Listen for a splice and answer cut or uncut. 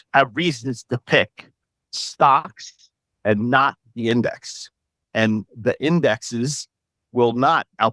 uncut